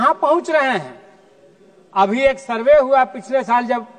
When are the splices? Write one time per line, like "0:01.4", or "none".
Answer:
none